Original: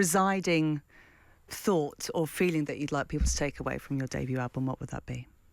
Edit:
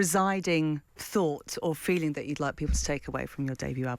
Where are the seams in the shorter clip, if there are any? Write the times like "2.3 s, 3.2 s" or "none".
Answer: 0.9 s